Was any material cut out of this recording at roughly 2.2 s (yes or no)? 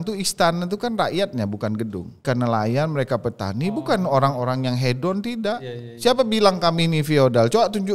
yes